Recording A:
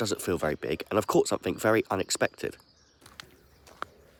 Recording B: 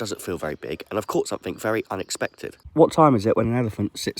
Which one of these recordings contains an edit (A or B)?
B